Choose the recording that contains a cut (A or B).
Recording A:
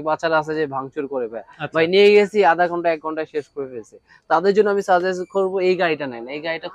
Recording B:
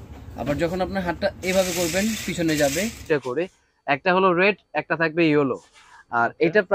B